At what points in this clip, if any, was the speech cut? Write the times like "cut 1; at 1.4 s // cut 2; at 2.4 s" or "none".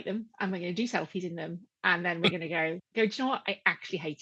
cut 1; at 2.8 s